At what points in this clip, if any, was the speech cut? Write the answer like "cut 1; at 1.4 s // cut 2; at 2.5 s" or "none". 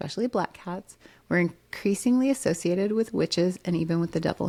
none